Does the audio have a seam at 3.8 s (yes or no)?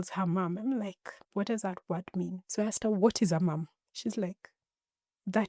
yes